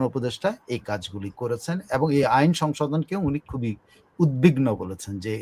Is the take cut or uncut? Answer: uncut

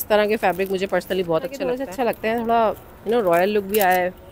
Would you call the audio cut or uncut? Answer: cut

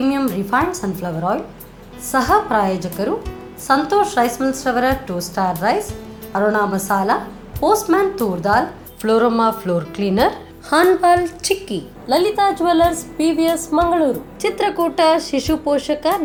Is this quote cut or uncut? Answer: uncut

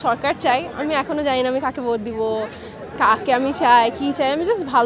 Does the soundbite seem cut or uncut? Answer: uncut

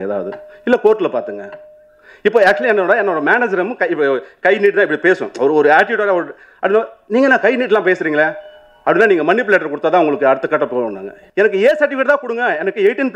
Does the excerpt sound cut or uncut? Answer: cut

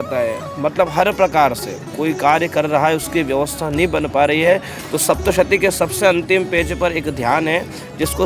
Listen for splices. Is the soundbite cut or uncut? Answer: uncut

